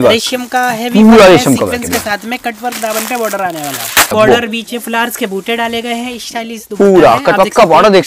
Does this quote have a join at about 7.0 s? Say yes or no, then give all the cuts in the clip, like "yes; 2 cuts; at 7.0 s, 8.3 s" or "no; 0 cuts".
no; 1 cut; at 4.1 s